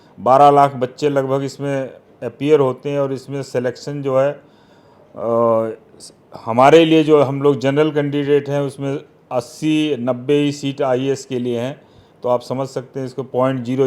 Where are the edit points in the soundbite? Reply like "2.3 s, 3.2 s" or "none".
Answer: none